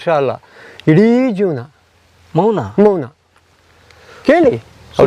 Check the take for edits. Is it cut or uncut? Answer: uncut